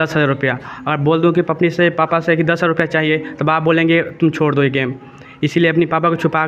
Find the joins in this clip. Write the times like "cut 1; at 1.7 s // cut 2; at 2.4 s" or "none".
none